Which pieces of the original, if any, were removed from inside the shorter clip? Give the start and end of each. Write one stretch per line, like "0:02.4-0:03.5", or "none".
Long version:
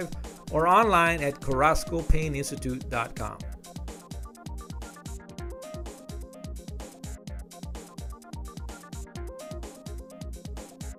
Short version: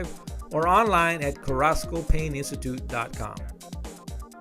0:03.3-0:07.2

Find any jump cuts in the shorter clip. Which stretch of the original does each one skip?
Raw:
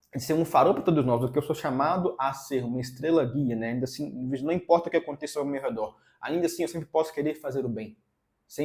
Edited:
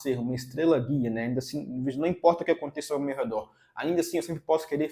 none

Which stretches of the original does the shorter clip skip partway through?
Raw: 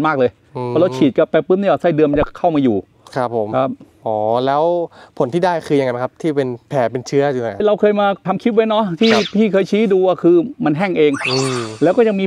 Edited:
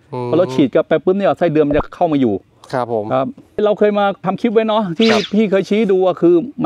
0:03.9-0:07.5

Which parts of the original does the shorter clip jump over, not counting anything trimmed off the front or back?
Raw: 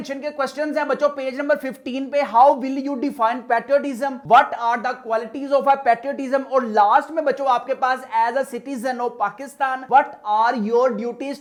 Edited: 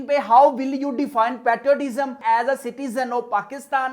0:04.2-0:08.0

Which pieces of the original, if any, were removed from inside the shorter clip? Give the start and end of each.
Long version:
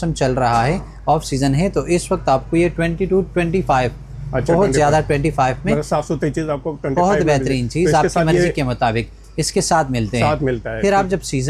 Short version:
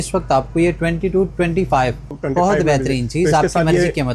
0:04.1-0:06.7

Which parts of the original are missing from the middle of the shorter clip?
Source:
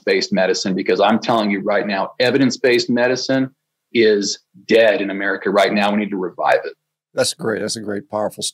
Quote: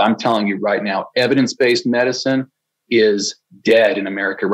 none

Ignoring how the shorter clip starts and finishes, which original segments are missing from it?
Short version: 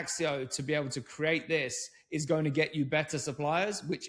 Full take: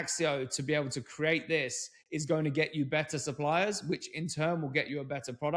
none

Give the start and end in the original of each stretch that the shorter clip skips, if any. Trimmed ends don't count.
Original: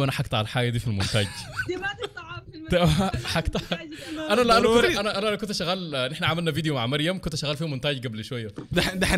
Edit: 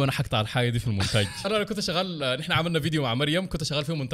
0:01.4-0:05.1

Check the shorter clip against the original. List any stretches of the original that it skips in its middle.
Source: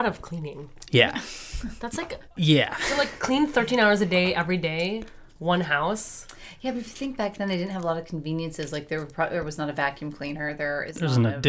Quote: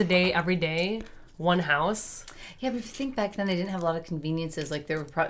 none

